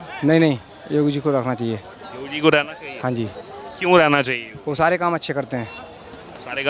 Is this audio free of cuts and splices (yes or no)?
yes